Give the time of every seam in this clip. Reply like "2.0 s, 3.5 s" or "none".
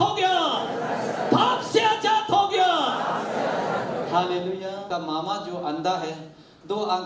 4.8 s